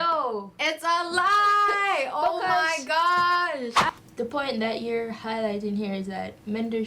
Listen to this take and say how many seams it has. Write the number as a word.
one